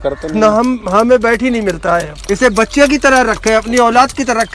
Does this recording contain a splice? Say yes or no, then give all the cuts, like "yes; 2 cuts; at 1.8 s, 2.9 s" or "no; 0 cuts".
yes; 1 cut; at 2.2 s